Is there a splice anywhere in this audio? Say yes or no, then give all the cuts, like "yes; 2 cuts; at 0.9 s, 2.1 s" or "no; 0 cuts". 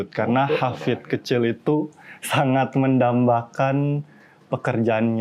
no; 0 cuts